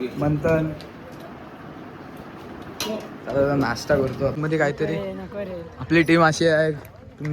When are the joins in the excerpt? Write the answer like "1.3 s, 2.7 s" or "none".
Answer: 4.3 s